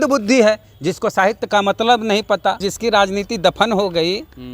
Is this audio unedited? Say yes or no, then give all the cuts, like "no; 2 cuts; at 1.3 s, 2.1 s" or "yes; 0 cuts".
no; 1 cut; at 2.6 s